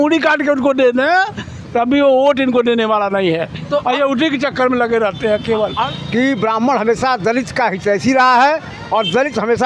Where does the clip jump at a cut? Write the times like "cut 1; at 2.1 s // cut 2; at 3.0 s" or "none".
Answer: cut 1; at 5.7 s